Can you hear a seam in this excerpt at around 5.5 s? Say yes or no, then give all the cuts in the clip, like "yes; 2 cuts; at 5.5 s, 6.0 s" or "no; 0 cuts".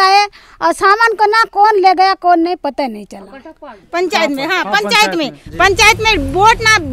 no; 1 cut; at 3.8 s